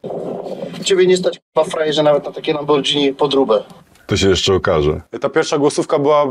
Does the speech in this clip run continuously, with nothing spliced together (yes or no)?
yes